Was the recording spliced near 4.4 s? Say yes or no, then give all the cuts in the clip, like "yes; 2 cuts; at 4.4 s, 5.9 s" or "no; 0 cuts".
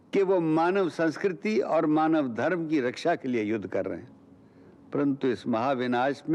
no; 0 cuts